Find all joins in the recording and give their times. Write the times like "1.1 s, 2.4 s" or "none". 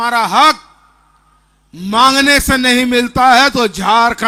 none

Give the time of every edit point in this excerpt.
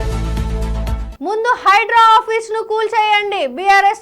1.0 s

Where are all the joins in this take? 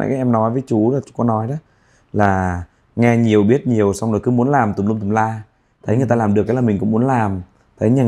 none

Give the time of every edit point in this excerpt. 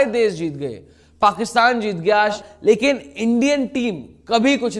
2.4 s

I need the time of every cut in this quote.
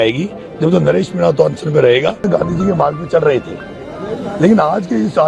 2.2 s

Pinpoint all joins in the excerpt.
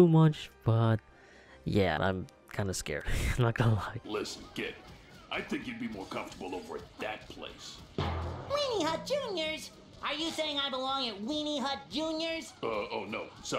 2.0 s, 4.0 s

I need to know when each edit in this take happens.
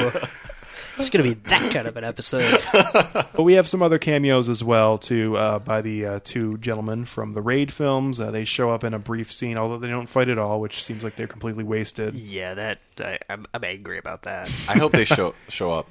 3.3 s

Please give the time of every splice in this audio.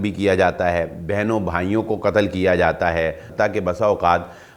3.2 s

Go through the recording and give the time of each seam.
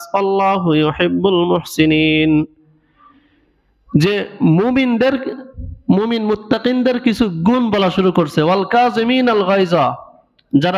none

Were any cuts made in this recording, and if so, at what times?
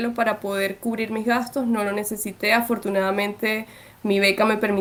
none

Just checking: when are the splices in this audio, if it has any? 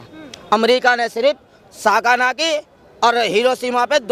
none

